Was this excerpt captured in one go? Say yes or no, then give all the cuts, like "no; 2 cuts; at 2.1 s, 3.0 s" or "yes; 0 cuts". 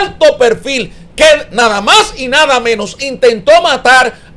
yes; 0 cuts